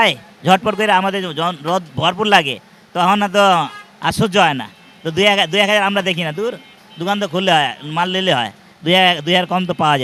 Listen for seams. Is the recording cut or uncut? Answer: uncut